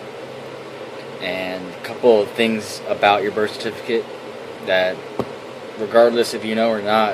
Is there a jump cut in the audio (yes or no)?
yes